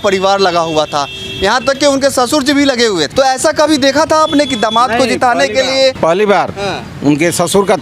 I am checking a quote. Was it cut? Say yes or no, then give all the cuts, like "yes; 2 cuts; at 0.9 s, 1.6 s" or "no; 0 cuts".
yes; 2 cuts; at 3.1 s, 6.0 s